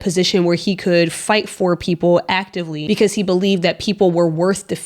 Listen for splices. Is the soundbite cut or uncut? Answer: cut